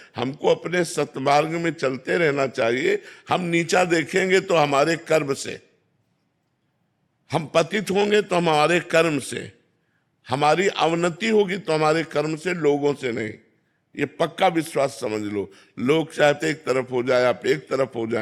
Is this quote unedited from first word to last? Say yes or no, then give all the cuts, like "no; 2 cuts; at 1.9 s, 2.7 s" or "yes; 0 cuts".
yes; 0 cuts